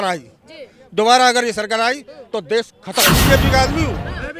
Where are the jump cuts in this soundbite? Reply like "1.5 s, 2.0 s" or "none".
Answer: 3.2 s

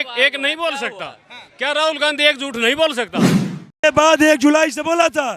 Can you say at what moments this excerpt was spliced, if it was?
3.5 s

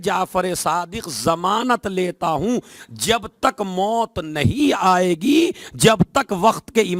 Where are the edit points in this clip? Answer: none

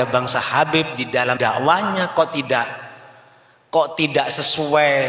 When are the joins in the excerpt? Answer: 1.4 s

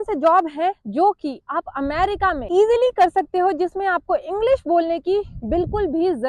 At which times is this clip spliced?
none

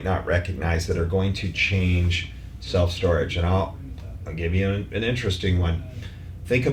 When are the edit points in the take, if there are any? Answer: none

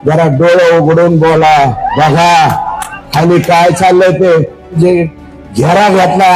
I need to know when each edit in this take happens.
4.7 s

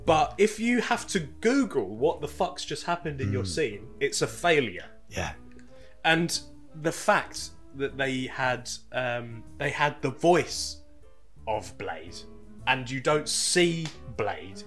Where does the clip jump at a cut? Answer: 9.4 s

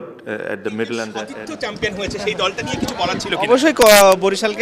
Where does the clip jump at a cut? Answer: 1.3 s

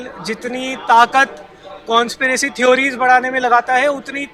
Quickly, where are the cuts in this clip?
none

